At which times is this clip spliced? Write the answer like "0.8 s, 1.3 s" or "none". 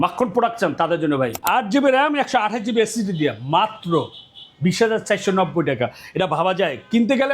1.4 s